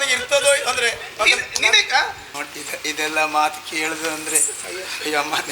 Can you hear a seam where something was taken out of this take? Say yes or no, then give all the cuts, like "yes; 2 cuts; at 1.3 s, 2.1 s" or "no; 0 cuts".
yes; 1 cut; at 2.2 s